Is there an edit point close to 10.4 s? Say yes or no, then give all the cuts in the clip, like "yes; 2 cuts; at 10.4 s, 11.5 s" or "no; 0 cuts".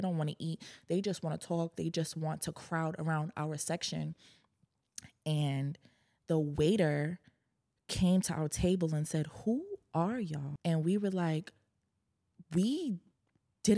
yes; 1 cut; at 10.4 s